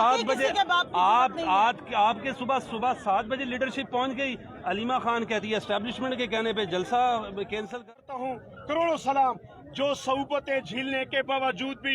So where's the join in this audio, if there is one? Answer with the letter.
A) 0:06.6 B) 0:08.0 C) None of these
B